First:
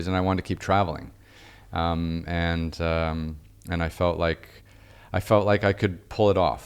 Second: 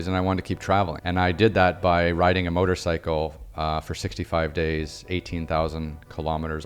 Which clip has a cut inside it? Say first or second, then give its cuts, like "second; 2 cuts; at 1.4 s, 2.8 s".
second; 1 cut; at 1.0 s